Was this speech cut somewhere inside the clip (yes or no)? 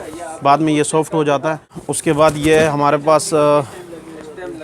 yes